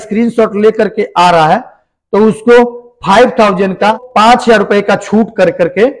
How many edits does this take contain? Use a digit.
1